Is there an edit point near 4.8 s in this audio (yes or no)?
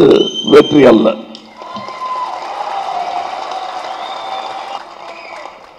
yes